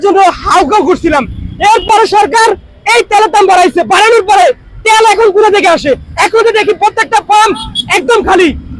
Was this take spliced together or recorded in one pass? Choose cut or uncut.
uncut